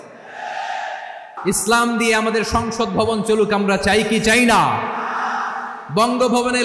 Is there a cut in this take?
yes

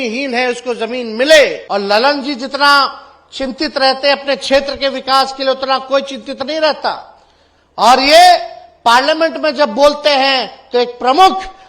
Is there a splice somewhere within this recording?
yes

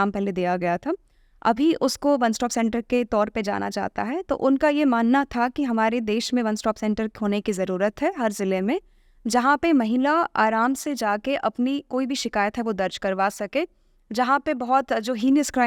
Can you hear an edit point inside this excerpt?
no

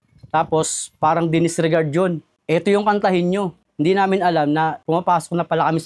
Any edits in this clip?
no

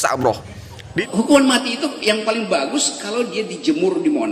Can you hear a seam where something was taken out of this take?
yes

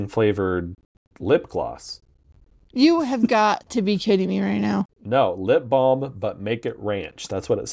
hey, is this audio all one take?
no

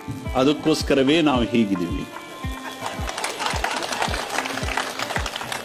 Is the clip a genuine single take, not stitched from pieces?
yes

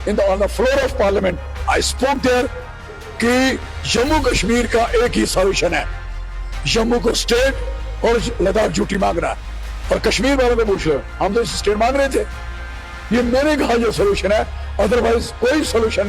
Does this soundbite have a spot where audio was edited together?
no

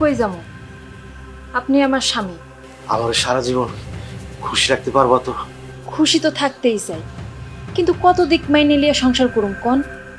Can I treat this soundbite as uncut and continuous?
yes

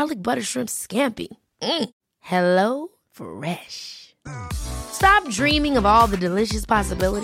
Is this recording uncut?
yes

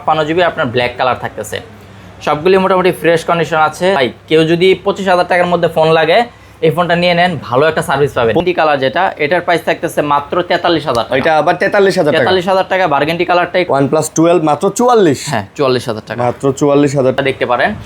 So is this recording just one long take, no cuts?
no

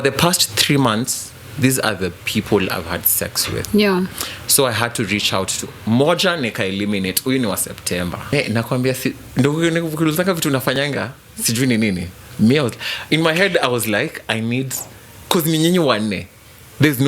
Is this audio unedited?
no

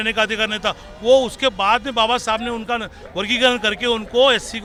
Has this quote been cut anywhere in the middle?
no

